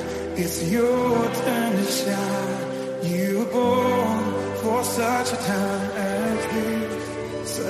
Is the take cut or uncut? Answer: uncut